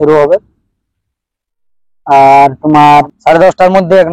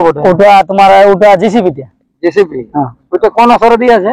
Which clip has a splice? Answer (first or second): first